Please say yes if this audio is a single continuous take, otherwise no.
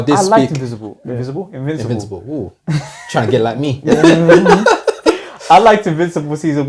yes